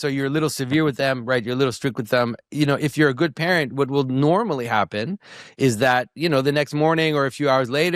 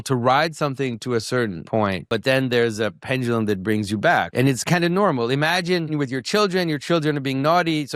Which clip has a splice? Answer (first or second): second